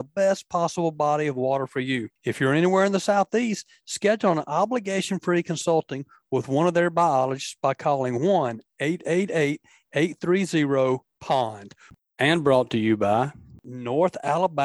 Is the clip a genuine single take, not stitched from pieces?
no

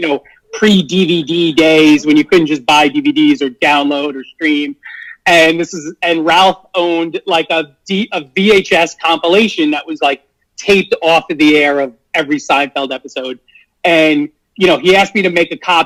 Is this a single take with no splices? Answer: yes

